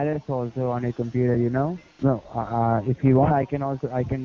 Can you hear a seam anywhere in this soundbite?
yes; 1 cut; at 1.9 s

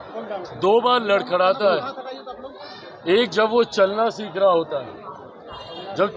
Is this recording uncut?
yes; 0 cuts

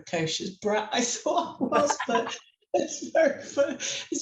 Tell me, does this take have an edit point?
no; 0 cuts

